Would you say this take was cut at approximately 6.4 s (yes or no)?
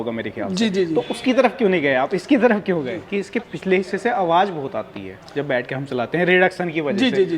no